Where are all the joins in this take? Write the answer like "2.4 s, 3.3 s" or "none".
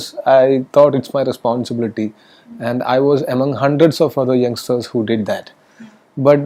none